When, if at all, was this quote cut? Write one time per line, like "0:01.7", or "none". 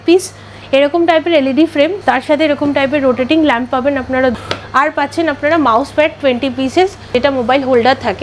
0:02.0
0:04.3
0:07.1